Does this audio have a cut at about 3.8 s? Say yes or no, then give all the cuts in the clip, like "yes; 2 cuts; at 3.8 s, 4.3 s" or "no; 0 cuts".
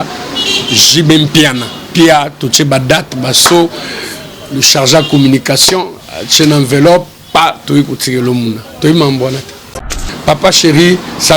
no; 1 cut; at 10.0 s